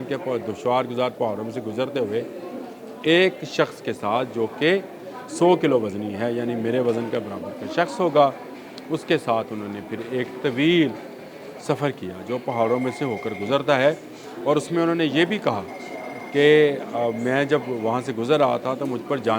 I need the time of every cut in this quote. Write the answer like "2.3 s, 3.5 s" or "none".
none